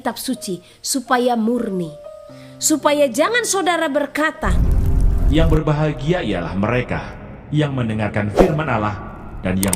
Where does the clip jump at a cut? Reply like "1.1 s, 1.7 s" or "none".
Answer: 4.6 s